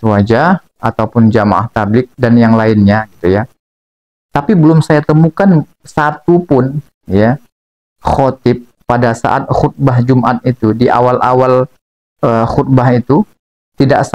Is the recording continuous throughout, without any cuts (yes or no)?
yes